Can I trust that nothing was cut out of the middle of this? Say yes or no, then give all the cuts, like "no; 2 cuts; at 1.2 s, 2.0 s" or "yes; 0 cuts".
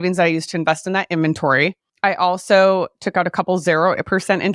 no; 1 cut; at 1.8 s